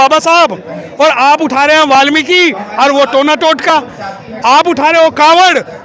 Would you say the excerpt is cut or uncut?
uncut